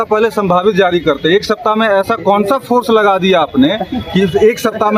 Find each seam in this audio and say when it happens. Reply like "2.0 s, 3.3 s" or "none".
none